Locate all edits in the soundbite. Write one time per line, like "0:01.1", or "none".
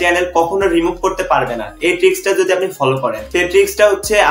0:03.2